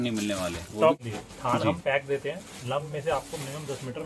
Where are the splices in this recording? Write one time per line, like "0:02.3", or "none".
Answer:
0:01.0